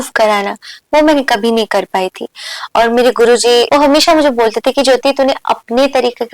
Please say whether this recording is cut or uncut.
cut